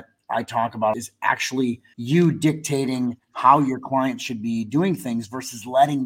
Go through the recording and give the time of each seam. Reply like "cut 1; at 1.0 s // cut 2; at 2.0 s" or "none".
cut 1; at 1.4 s